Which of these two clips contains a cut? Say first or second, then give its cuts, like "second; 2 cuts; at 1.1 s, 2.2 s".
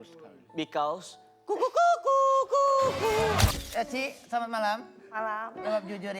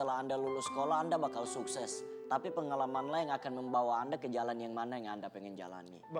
first; 1 cut; at 3.5 s